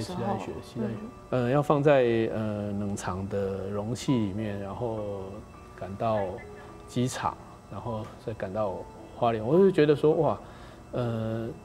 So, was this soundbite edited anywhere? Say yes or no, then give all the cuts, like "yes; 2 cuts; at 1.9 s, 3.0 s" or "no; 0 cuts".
yes; 1 cut; at 1.1 s